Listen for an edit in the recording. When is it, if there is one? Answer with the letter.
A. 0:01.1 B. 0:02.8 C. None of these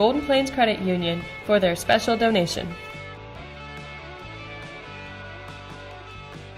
C